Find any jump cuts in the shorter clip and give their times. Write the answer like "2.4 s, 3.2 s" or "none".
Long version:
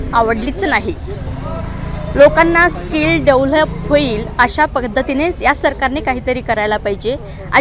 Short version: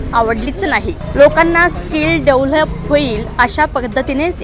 1.0 s